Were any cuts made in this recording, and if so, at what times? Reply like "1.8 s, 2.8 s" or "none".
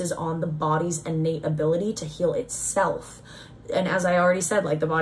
none